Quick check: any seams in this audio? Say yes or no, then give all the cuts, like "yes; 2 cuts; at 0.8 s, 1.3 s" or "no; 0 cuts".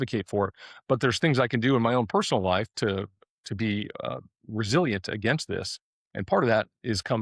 no; 0 cuts